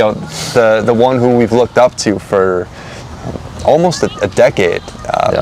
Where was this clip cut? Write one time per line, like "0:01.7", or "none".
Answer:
none

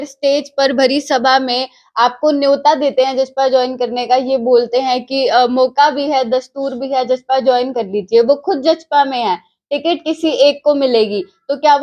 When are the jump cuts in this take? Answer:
none

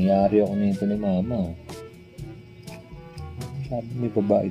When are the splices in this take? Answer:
none

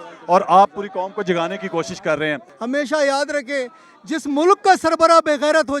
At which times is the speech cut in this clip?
0:02.5

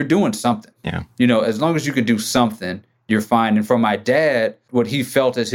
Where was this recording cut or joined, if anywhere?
0:04.6

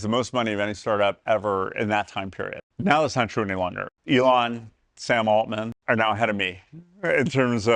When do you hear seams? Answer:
0:02.6
0:03.9
0:05.8

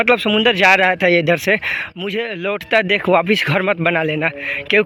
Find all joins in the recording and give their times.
none

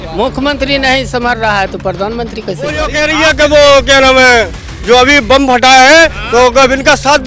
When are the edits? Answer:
0:02.8

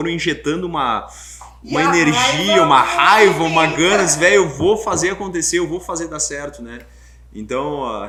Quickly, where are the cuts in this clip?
none

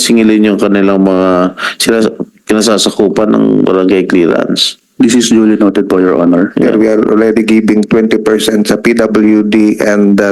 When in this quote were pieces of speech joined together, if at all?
0:06.7

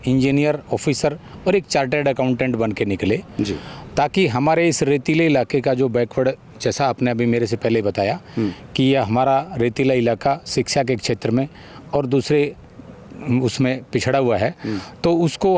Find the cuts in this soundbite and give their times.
none

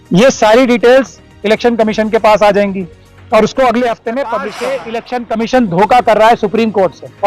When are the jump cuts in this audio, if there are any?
0:04.5

